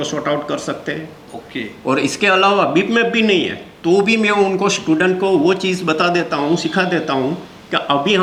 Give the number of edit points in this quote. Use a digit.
0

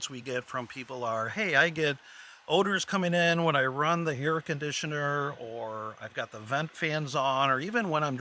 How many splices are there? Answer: 0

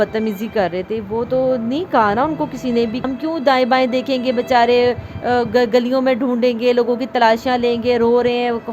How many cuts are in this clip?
1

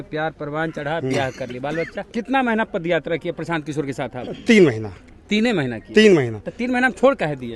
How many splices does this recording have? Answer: 1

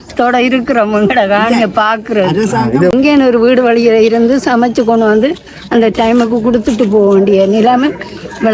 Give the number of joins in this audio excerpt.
1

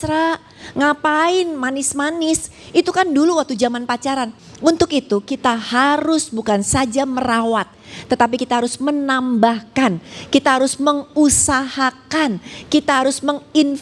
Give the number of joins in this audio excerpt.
1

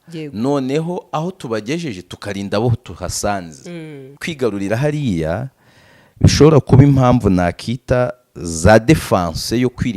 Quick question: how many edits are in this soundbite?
1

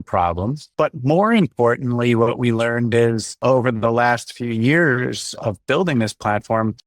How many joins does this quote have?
1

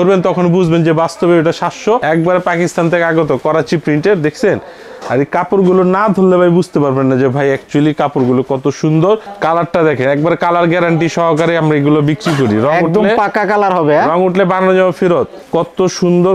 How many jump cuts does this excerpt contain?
3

